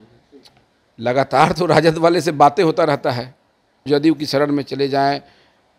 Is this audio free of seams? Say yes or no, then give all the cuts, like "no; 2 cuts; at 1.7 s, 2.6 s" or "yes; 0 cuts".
no; 1 cut; at 3.9 s